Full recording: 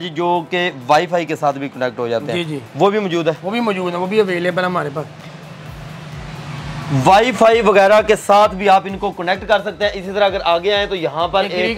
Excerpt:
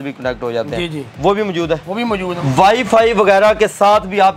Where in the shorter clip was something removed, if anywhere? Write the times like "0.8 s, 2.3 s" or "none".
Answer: 2.4 s